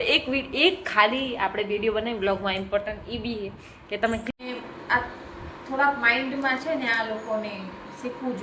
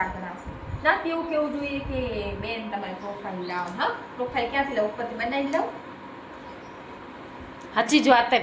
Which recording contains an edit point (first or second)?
first